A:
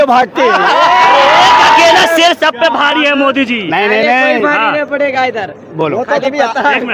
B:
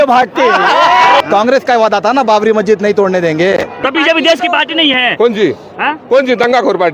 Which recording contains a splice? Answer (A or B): B